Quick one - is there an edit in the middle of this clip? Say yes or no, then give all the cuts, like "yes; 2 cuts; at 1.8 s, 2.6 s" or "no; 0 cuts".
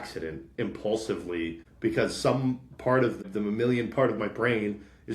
yes; 2 cuts; at 1.6 s, 3.2 s